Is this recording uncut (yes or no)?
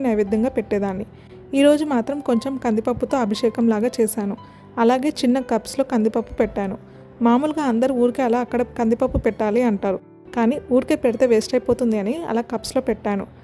yes